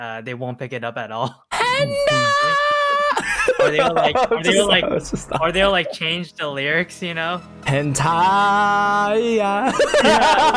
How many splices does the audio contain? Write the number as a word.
one